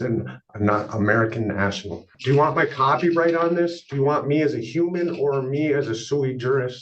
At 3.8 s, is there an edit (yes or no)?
no